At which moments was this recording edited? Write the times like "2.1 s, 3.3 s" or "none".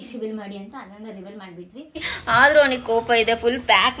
2.1 s